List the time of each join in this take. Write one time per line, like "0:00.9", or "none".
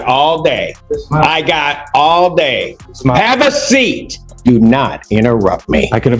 0:04.3

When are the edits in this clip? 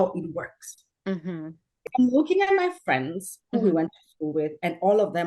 0:01.9

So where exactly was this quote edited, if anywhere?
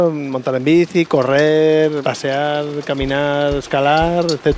0:02.0

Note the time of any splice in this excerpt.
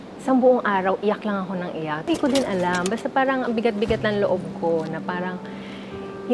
0:02.1

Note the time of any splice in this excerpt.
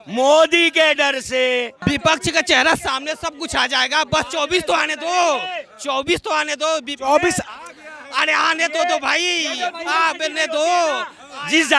0:01.7

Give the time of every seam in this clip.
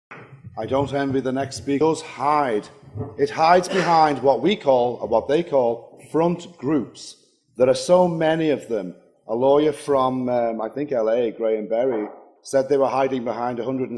none

